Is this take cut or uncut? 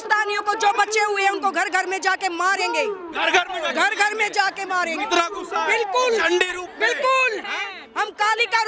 uncut